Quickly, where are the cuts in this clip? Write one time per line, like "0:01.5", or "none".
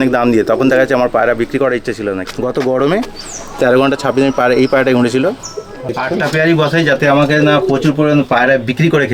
0:02.2
0:05.9